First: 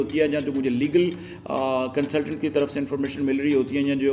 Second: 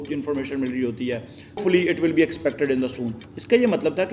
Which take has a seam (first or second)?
second